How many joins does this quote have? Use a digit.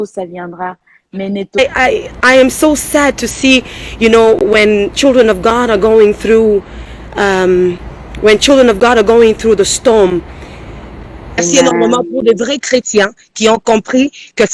2